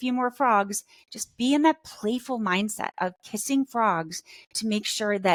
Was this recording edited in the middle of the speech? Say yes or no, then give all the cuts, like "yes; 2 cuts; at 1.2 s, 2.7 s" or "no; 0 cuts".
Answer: no; 0 cuts